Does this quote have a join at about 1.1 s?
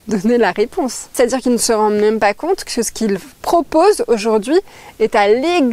yes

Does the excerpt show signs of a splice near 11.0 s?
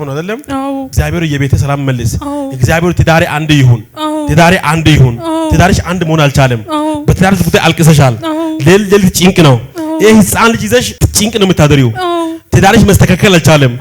yes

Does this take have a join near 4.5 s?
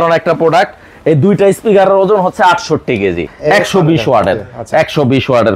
no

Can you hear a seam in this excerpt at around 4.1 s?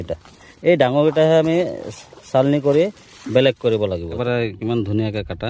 yes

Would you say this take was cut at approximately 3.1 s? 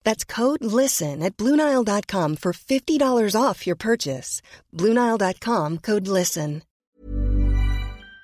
no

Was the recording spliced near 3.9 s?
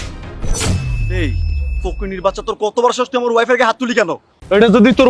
yes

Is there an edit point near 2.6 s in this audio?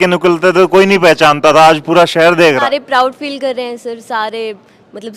yes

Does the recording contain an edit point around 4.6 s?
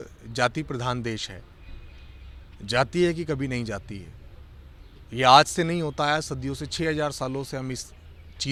no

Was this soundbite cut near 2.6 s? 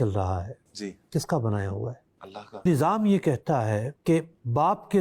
yes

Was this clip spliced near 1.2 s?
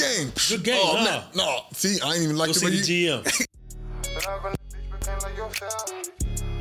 no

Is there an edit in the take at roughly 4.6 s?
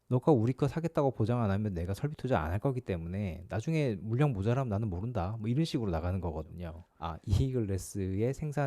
no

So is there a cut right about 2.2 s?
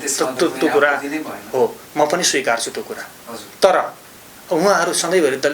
no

